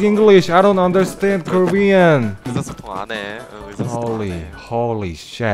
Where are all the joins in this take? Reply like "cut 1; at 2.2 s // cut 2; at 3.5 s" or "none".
cut 1; at 2.5 s